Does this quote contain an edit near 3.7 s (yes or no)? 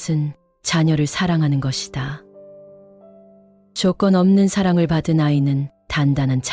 yes